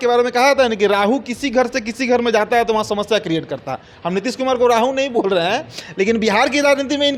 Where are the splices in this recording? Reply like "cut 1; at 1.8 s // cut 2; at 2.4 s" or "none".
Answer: none